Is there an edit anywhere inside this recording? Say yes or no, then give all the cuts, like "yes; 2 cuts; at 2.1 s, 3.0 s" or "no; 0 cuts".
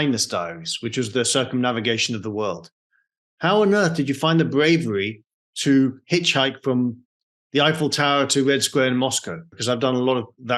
yes; 1 cut; at 9.5 s